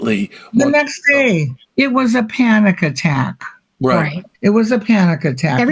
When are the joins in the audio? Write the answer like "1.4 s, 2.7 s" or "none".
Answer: 1.6 s, 4.2 s